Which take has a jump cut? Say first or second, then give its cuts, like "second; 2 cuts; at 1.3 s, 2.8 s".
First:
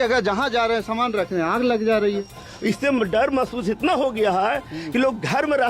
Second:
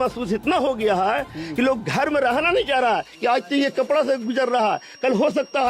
first; 1 cut; at 2.2 s